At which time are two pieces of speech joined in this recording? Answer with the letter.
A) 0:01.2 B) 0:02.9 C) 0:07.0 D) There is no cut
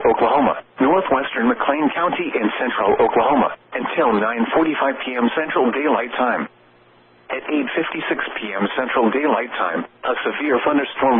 A